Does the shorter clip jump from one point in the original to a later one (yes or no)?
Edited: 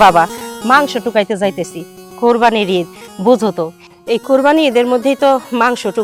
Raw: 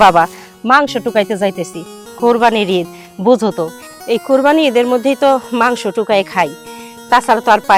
no